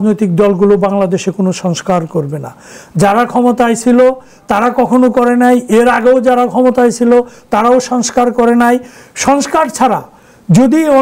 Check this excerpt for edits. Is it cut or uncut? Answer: uncut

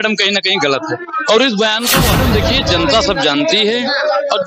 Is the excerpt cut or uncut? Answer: cut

